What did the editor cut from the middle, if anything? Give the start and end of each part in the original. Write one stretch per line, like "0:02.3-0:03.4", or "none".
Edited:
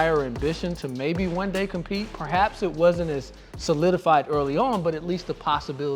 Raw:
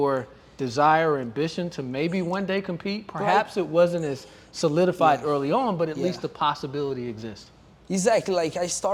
none